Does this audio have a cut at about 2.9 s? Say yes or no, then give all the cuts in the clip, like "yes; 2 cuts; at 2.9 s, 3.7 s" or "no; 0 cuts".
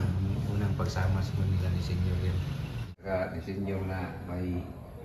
yes; 1 cut; at 2.9 s